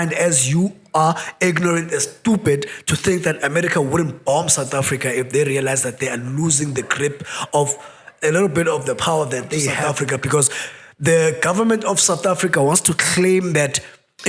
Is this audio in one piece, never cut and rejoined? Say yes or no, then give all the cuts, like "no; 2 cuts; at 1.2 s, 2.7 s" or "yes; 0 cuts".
no; 1 cut; at 9.8 s